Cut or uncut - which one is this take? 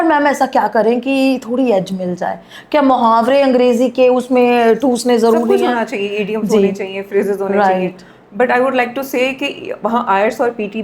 uncut